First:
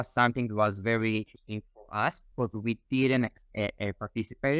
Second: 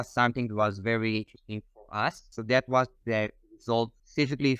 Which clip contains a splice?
second; 1 cut; at 2.3 s

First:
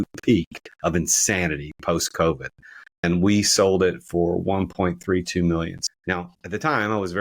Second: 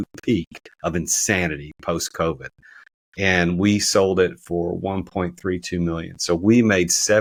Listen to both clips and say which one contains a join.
first; 2 cuts; at 3.0 s, 5.8 s

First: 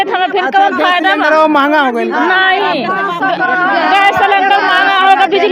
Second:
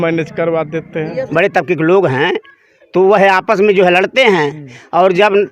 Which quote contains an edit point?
second; 1 cut; at 1.2 s

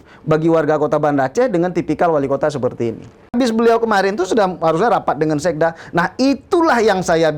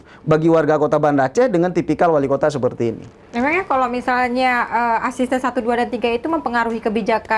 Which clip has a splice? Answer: first; 1 cut; at 3.3 s

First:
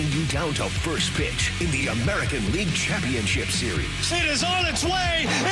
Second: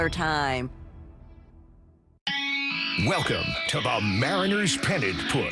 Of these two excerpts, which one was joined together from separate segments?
second; 1 cut; at 2.2 s

